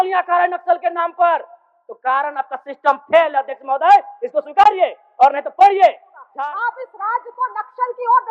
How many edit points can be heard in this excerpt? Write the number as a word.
one